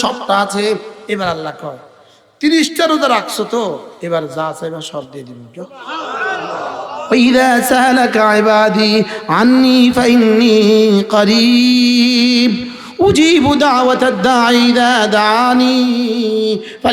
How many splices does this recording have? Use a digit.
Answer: 2